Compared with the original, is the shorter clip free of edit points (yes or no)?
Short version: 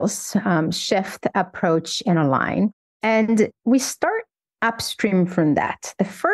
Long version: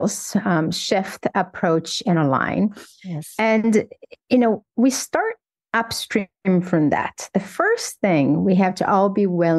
no